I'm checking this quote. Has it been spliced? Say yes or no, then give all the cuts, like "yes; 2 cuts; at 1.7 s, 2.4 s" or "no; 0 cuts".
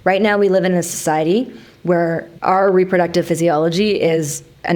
yes; 1 cut; at 2.3 s